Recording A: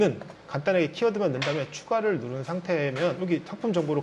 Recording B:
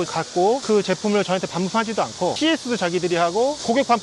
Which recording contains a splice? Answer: B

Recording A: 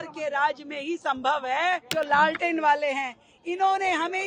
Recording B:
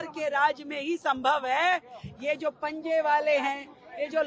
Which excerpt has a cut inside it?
A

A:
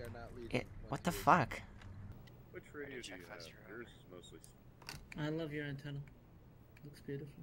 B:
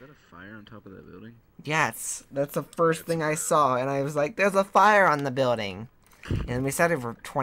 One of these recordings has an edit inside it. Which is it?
A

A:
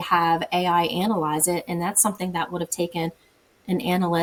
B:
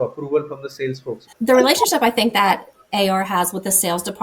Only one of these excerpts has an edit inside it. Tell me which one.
B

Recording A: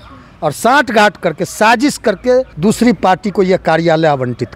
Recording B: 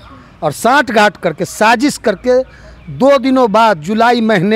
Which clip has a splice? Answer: A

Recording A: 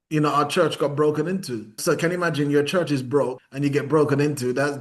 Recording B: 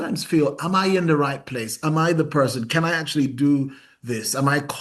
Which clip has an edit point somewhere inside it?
A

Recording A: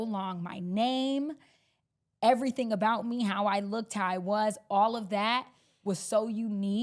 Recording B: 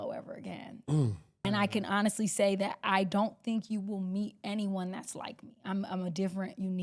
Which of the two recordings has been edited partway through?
B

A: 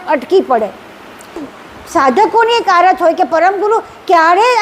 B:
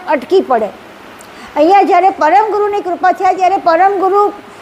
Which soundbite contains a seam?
A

